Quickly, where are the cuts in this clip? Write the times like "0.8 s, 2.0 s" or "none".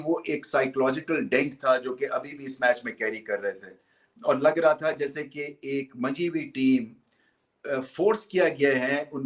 none

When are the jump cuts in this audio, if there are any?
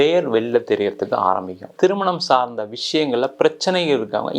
1.7 s

